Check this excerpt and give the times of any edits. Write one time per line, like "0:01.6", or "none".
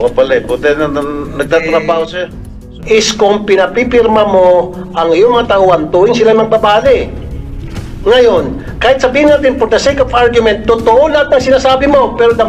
0:02.6